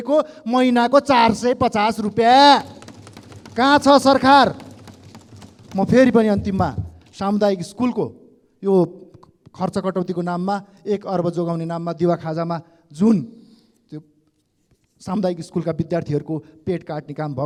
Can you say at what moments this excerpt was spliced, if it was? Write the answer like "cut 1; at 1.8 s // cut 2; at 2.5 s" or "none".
none